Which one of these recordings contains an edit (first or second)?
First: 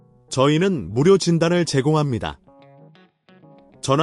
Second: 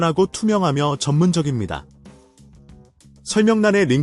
second